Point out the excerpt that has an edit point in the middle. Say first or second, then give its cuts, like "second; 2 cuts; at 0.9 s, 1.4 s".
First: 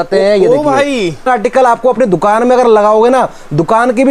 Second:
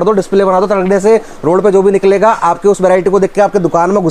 first; 1 cut; at 1.3 s